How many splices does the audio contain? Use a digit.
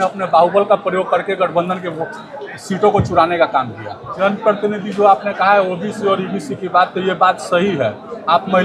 1